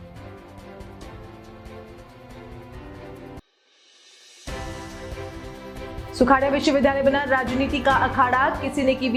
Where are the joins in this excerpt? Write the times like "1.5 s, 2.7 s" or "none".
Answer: none